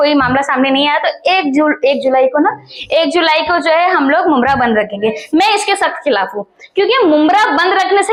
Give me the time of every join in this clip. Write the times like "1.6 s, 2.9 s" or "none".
none